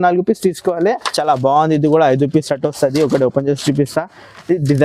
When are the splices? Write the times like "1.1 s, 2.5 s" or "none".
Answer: 1.1 s